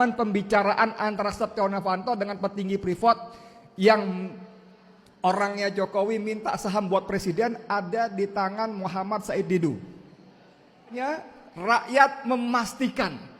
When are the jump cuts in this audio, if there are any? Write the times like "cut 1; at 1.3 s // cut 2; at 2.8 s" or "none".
cut 1; at 10.9 s